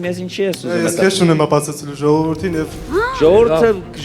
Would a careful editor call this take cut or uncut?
uncut